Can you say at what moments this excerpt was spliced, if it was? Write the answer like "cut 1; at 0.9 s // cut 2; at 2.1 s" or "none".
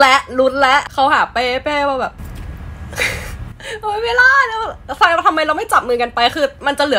cut 1; at 0.8 s // cut 2; at 2.2 s